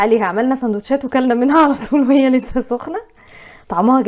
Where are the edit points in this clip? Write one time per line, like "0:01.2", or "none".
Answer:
none